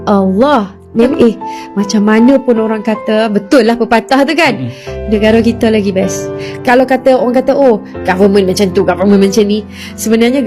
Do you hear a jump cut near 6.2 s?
no; 1 cut; at 1.1 s

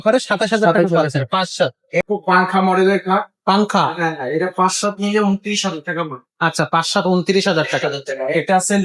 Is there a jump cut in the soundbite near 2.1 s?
yes; 1 cut; at 2.1 s

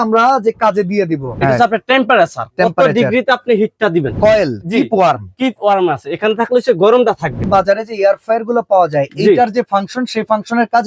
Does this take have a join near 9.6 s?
no; 3 cuts; at 1.3 s, 4.2 s, 7.4 s

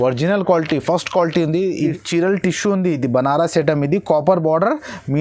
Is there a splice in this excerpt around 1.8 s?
yes; 1 cut; at 1.8 s

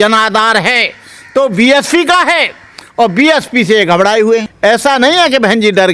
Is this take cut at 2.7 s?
no; 1 cut; at 4.5 s

